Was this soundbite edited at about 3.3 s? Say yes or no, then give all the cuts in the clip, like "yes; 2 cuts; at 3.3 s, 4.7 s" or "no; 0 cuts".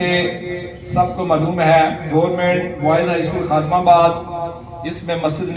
no; 1 cut; at 2.0 s